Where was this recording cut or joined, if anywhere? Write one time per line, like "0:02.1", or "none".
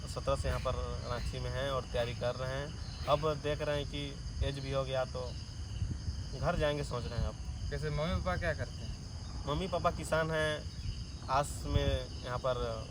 none